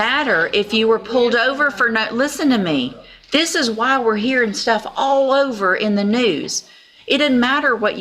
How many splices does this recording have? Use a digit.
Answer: 0